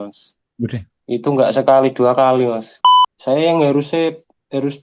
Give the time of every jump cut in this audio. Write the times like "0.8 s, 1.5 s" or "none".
2.8 s